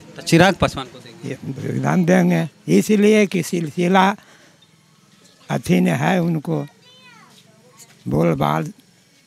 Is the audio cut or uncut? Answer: uncut